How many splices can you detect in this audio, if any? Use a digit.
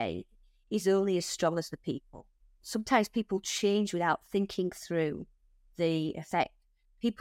1